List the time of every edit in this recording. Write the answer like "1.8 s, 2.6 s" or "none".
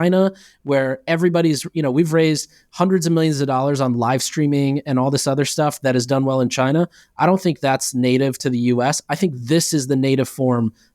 none